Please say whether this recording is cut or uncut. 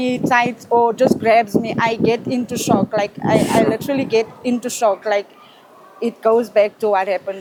uncut